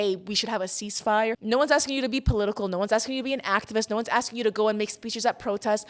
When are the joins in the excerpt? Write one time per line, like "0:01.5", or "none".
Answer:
0:01.4